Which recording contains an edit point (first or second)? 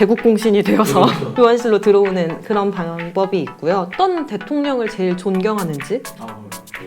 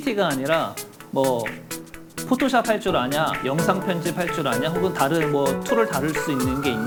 first